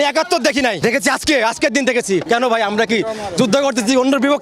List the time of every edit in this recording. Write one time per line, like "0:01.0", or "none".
0:00.8
0:02.2